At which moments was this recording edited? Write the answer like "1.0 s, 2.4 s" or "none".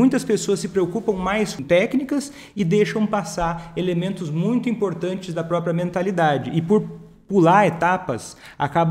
1.6 s